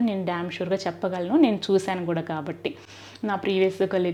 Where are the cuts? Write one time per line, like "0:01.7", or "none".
none